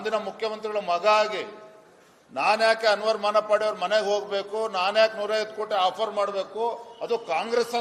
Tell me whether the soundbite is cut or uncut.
uncut